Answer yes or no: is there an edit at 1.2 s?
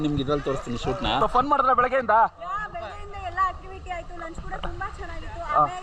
yes